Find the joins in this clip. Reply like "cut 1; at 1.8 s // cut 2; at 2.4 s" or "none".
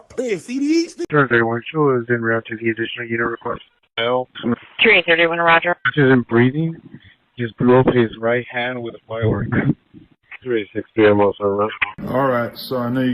cut 1; at 1.0 s // cut 2; at 11.8 s